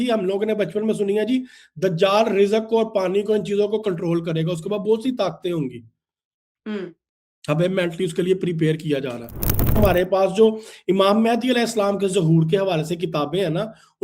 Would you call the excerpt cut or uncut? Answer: cut